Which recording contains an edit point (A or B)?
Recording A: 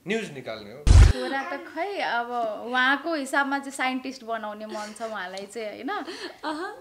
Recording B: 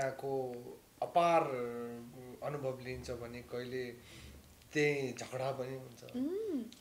A